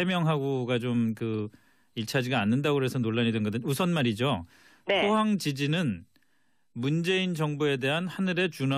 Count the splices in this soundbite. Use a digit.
1